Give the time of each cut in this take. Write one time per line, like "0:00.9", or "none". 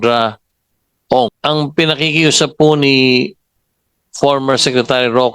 0:01.4